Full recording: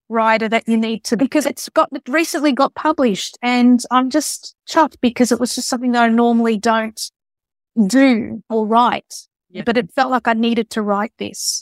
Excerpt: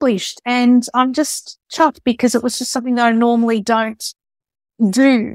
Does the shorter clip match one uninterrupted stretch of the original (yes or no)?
yes